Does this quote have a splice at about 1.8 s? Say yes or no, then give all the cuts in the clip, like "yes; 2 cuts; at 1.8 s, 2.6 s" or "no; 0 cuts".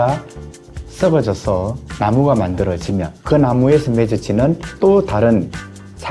yes; 1 cut; at 1.8 s